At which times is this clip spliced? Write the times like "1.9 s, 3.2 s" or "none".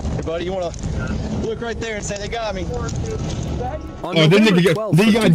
3.9 s